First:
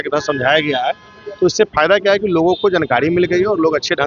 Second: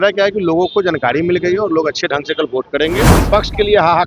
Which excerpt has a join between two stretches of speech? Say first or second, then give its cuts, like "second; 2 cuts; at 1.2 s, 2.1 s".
second; 1 cut; at 3.1 s